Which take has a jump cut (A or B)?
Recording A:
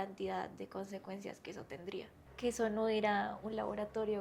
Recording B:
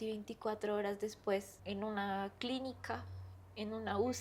A